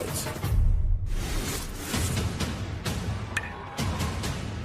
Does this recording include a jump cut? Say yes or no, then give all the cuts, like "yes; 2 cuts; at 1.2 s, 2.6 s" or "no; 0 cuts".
yes; 1 cut; at 2.0 s